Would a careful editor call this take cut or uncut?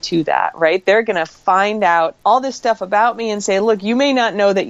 cut